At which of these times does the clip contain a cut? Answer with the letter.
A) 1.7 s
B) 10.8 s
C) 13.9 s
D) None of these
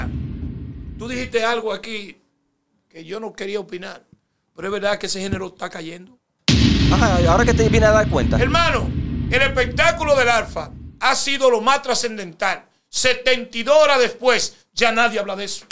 D